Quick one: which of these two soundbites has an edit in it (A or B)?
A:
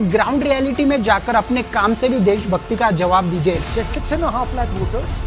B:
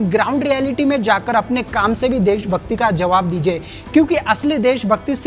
A